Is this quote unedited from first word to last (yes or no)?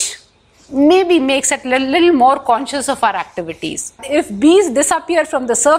no